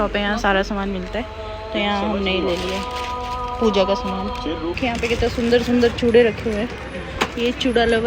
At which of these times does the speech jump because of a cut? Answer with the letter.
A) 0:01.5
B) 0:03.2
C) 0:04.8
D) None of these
C